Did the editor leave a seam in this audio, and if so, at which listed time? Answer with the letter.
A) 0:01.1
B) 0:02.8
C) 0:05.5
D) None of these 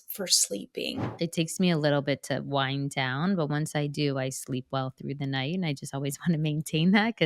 A